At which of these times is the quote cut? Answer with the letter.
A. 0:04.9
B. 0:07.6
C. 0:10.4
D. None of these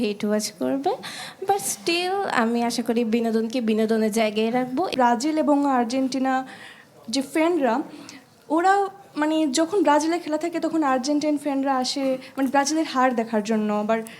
A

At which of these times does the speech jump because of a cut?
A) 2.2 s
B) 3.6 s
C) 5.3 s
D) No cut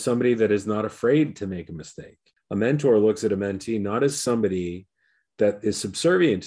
A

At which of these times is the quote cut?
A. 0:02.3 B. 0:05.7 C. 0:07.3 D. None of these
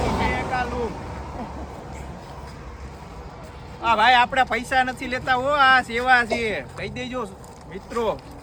D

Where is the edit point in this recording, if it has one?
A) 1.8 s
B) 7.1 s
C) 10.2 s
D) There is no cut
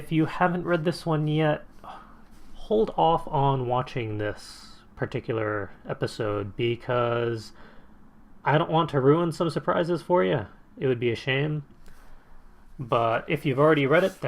B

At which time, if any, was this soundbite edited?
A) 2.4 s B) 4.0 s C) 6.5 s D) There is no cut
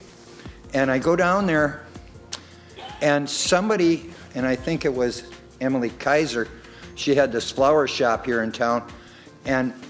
A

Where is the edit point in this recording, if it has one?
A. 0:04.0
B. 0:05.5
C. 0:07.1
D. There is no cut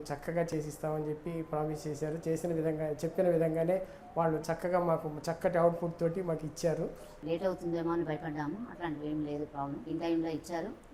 C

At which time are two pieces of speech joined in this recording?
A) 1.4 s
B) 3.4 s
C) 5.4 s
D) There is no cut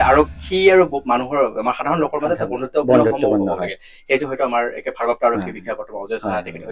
D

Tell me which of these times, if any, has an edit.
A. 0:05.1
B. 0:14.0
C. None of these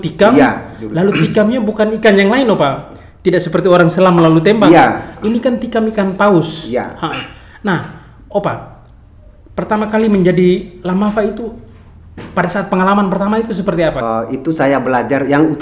B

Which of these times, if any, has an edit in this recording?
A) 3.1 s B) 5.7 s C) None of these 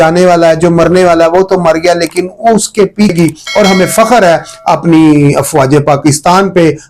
A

